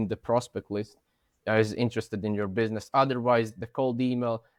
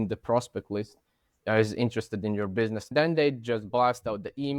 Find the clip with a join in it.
second; 1 cut; at 2.9 s

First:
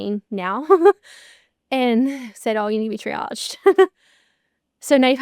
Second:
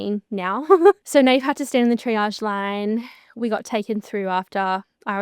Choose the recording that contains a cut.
second; 1 cut; at 1.0 s

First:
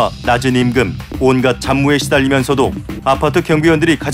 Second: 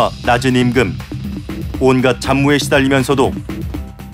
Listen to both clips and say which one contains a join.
first; 2 cuts; at 1.0 s, 2.9 s

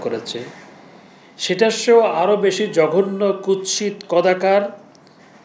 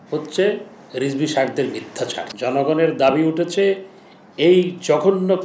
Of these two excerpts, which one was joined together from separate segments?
second; 1 cut; at 2.2 s

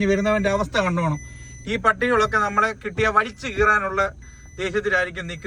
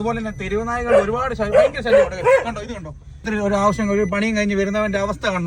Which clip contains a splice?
second; 1 cut; at 3.3 s

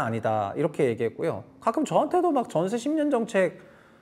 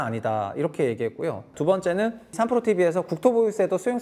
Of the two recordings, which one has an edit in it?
second; 2 cuts; at 1.5 s, 2.4 s

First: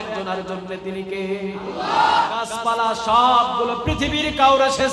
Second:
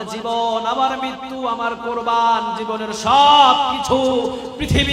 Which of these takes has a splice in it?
first; 1 cut; at 2.3 s

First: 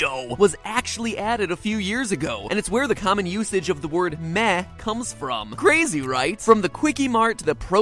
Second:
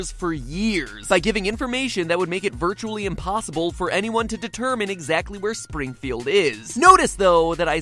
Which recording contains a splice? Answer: first; 1 cut; at 3.2 s

